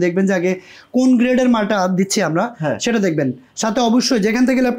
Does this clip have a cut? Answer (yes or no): no